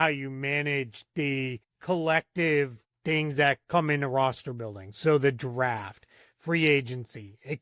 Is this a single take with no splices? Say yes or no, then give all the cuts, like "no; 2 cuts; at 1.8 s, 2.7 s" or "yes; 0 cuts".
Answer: no; 2 cuts; at 1.7 s, 2.9 s